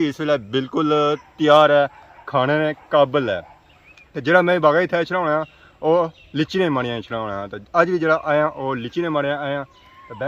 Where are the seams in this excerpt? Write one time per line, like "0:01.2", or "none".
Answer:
none